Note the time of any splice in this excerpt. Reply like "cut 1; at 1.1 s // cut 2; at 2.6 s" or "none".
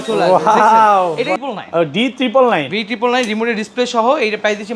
cut 1; at 1.4 s